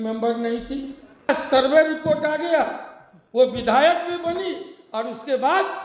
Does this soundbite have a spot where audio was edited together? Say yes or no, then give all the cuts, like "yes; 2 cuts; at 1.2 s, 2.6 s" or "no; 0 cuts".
yes; 1 cut; at 1.3 s